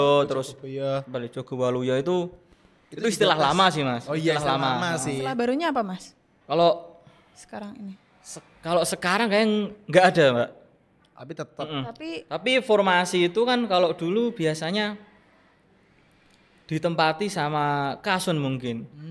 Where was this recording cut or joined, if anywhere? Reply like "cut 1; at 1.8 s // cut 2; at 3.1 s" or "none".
none